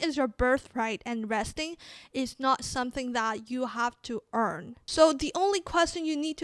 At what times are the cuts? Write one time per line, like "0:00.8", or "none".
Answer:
0:04.7